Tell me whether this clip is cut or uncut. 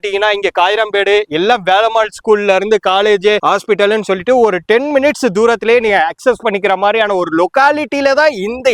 uncut